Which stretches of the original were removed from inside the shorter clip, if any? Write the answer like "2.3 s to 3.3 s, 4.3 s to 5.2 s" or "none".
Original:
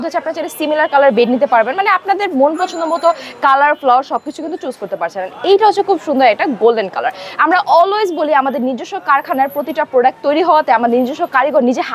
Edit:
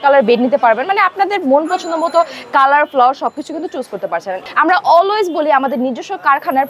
5.3 s to 7.2 s